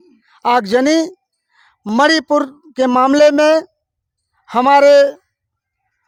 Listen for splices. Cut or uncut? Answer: uncut